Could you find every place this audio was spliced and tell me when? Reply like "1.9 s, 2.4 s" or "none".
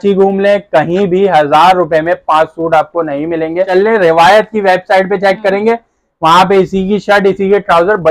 3.7 s

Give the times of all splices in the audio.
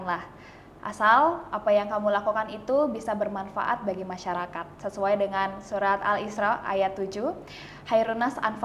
none

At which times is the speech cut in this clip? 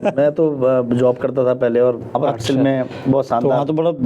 2.2 s

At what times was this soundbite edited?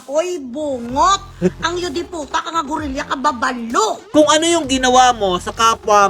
1.3 s, 4.0 s

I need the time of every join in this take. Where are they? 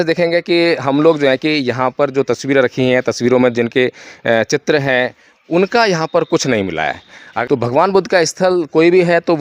7.3 s

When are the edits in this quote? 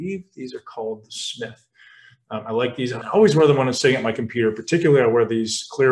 3.0 s

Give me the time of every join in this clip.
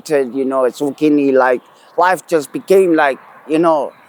none

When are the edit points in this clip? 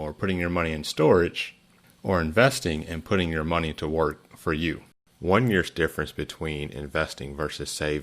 5.0 s

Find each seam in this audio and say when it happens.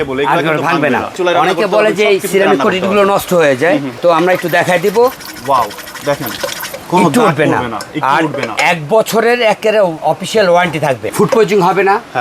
1.1 s, 3.9 s, 10.0 s, 11.0 s

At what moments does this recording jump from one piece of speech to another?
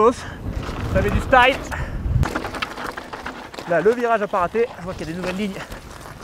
2.2 s

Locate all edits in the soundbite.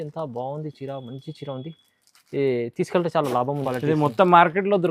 3.6 s

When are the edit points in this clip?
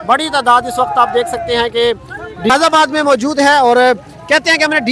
2.5 s

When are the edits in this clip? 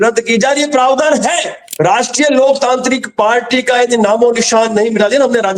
1.7 s

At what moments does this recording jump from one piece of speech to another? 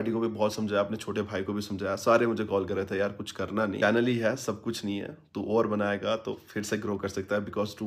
none

